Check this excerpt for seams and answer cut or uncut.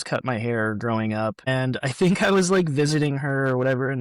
cut